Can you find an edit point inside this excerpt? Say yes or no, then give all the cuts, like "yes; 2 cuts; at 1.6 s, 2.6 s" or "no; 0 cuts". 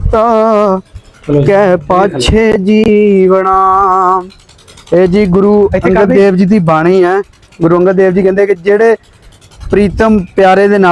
no; 0 cuts